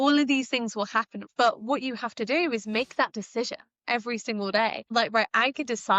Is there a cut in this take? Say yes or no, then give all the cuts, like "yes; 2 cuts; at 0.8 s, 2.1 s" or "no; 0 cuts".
yes; 2 cuts; at 1.2 s, 4.9 s